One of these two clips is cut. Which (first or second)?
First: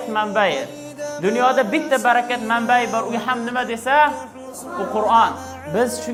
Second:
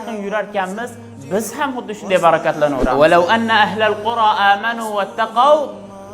second